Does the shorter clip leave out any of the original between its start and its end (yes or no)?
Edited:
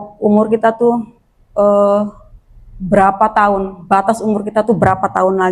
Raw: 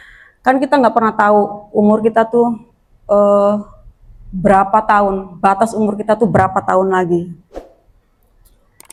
no